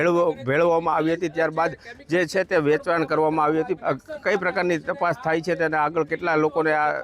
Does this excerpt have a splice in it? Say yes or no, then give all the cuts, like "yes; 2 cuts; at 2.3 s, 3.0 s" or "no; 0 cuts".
yes; 1 cut; at 3.8 s